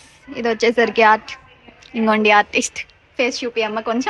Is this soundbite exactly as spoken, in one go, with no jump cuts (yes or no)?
yes